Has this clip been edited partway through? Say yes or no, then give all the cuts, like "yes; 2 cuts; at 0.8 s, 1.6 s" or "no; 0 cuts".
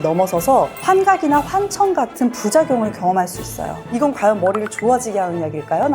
yes; 1 cut; at 3.9 s